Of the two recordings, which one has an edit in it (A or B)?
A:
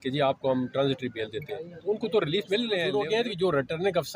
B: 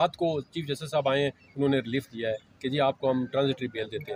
A